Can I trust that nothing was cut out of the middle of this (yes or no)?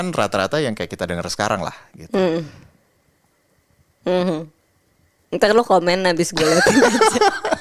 yes